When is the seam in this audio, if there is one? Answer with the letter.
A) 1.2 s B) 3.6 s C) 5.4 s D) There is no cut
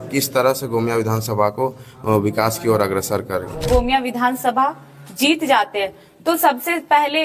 B